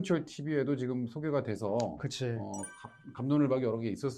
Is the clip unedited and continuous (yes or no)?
yes